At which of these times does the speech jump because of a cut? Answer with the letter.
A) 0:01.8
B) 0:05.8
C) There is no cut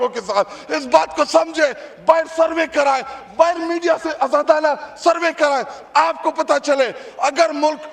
C